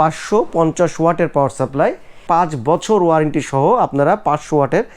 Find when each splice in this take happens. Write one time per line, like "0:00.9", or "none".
0:02.2